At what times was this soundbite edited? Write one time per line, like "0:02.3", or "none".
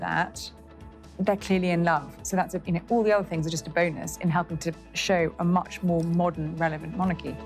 none